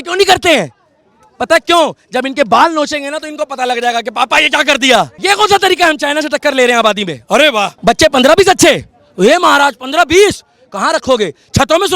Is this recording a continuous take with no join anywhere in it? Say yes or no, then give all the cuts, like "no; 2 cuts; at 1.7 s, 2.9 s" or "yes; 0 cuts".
no; 2 cuts; at 5.1 s, 7.7 s